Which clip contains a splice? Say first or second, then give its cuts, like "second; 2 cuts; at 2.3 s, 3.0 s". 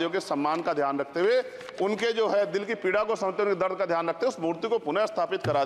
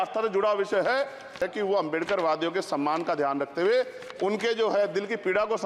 second; 1 cut; at 1.4 s